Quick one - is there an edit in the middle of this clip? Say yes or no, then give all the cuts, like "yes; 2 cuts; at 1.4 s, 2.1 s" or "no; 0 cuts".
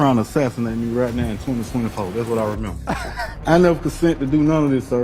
yes; 1 cut; at 3.4 s